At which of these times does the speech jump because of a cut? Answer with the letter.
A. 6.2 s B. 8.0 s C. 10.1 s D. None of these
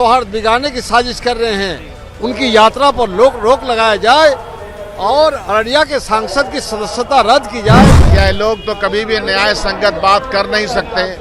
B